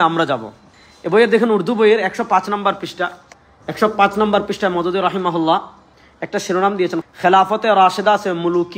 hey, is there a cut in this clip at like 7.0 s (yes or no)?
yes